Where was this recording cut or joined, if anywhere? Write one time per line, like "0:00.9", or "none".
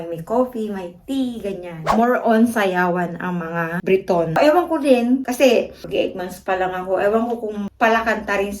0:01.9
0:04.4